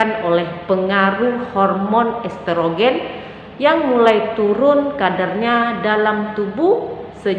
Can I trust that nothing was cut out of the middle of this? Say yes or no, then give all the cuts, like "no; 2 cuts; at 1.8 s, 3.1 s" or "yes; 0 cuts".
yes; 0 cuts